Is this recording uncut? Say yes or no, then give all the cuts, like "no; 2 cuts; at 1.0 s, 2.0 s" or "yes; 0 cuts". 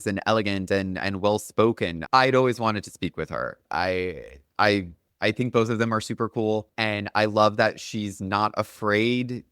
no; 2 cuts; at 5.0 s, 6.7 s